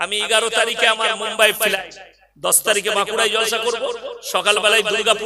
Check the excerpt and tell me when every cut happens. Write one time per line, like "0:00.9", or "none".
0:01.7